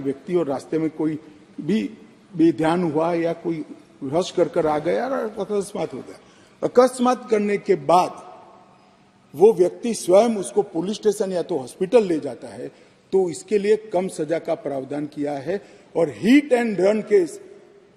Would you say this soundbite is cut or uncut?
uncut